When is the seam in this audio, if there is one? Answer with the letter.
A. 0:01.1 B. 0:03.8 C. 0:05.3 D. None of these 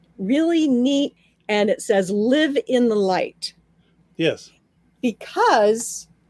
A